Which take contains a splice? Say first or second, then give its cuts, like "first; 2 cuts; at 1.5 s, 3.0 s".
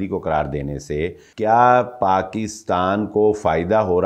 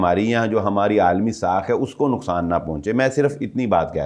first; 1 cut; at 1.2 s